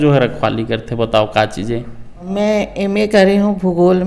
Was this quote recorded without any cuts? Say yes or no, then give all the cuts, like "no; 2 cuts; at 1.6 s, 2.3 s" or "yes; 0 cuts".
no; 1 cut; at 2.3 s